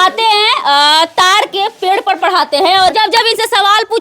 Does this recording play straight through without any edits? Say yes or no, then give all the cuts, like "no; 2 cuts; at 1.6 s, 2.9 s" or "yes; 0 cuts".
no; 1 cut; at 2.9 s